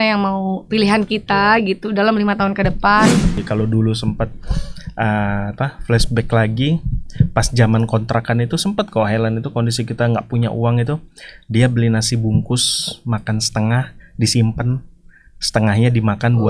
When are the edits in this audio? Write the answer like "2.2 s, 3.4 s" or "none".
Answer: 3.4 s